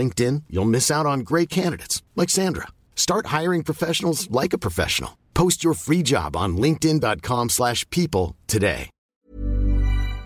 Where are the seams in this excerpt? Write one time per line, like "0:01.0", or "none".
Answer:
0:08.9

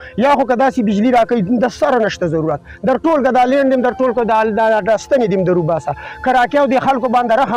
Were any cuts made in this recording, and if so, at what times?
none

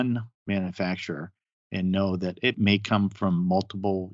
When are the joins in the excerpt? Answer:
0:02.6

